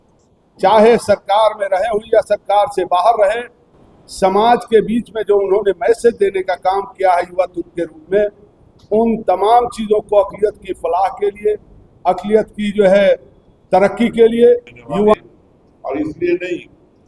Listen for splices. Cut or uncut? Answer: cut